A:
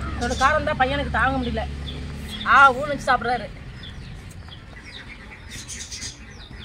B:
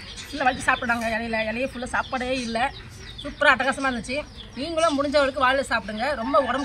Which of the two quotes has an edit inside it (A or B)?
A